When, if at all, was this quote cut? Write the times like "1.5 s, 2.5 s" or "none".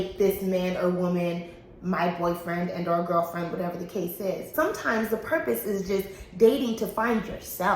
4.5 s